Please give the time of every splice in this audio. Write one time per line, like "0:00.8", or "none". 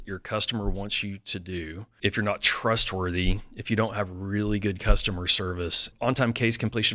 0:01.9
0:05.9